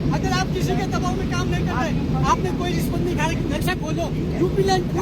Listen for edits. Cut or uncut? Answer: uncut